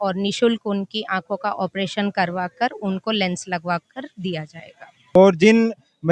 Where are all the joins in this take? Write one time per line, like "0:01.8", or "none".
0:05.1